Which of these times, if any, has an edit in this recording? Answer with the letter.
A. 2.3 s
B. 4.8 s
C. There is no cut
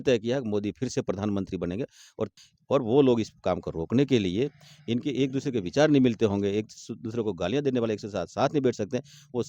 A